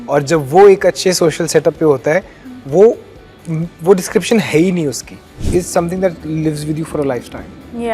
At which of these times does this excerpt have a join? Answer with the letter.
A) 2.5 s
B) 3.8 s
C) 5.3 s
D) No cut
C